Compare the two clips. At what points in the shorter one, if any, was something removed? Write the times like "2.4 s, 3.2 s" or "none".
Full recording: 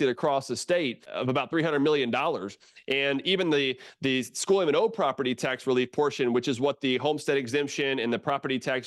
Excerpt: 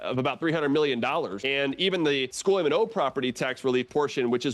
1.4 s, 2.3 s

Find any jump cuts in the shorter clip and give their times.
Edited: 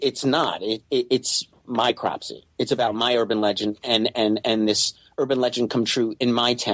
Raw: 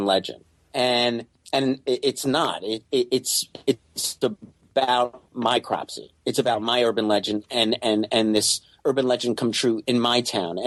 1.5 s

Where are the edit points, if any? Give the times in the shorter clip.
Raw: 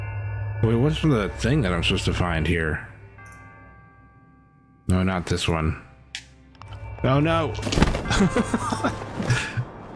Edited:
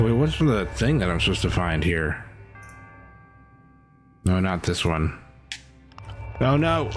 none

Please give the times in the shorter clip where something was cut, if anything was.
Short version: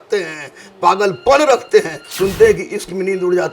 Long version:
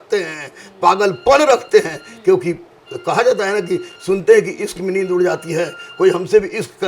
2.0 s

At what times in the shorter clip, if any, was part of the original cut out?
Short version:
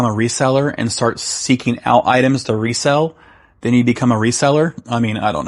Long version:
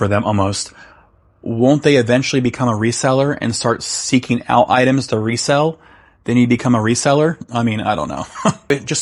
none

